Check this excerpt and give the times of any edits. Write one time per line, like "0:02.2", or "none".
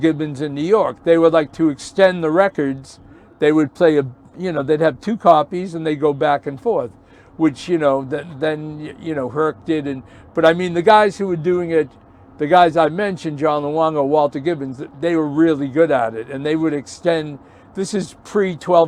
none